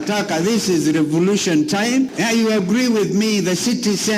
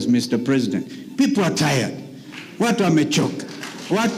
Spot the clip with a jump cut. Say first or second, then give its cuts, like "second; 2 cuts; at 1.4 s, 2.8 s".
first; 1 cut; at 2.1 s